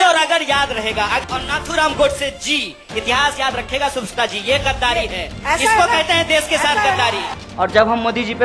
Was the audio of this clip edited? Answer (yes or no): yes